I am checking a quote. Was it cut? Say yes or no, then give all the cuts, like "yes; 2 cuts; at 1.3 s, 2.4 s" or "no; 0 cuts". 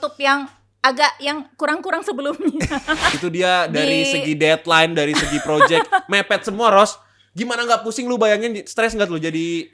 yes; 1 cut; at 3.1 s